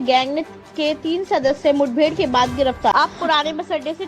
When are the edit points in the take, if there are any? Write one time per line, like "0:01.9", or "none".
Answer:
0:02.9